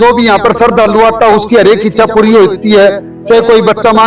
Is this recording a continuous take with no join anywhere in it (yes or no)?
yes